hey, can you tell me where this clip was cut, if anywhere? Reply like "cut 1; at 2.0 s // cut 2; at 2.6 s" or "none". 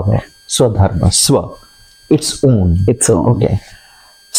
none

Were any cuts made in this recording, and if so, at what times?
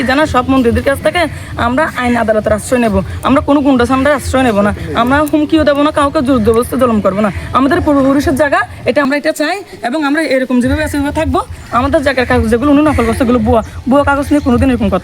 cut 1; at 9.0 s

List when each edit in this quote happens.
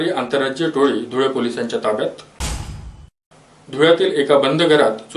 none

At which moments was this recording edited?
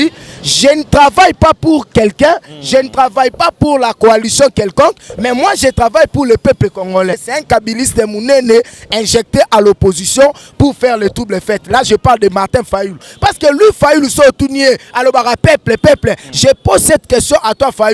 cut 1; at 7.3 s // cut 2; at 13.1 s

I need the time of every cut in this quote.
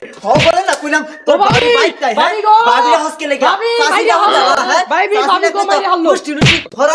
none

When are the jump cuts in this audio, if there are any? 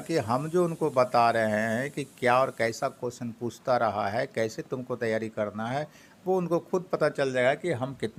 none

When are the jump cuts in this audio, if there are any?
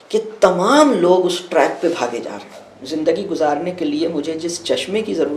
cut 1; at 2.8 s

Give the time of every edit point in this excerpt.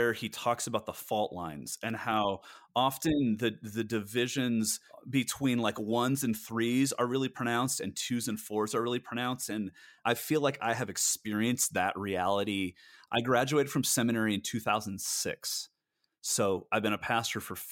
none

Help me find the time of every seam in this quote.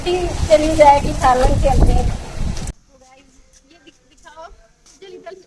cut 1; at 2.7 s

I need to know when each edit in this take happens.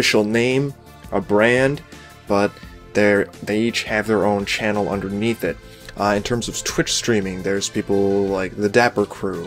cut 1; at 6.2 s

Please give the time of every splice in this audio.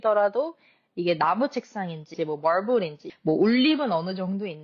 cut 1; at 2.1 s // cut 2; at 3.0 s

